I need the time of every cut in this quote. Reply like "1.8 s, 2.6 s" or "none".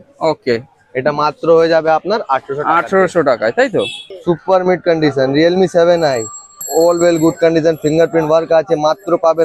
4.0 s, 6.6 s